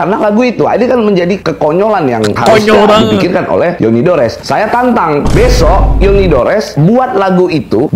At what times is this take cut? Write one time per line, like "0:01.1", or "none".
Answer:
none